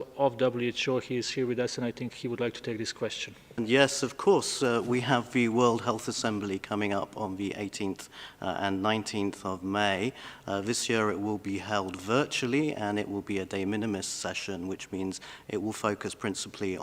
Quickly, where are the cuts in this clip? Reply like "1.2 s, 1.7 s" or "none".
3.5 s

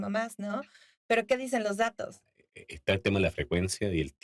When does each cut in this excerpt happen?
2.3 s

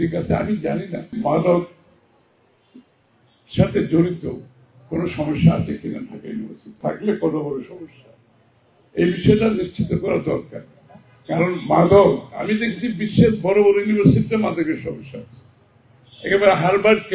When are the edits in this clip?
1.1 s, 6.8 s

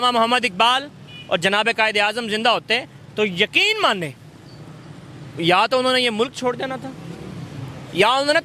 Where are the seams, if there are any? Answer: none

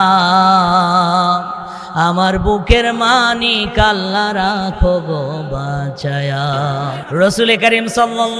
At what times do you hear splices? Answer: 7.0 s

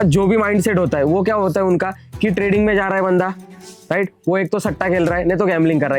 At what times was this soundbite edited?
none

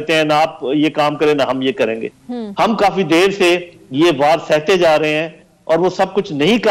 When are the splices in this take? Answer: none

